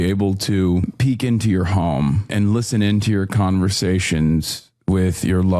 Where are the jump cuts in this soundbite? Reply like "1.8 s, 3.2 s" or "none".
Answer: 0.9 s, 2.3 s